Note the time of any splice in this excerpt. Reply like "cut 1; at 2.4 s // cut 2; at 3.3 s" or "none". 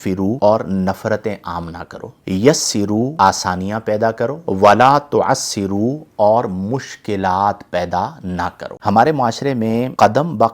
cut 1; at 8.6 s